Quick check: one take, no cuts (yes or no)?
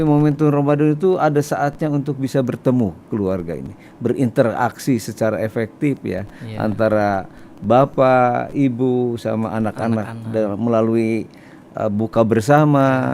yes